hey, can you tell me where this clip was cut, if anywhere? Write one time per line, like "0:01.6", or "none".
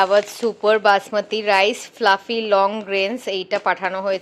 none